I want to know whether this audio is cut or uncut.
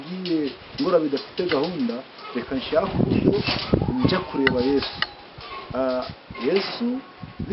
uncut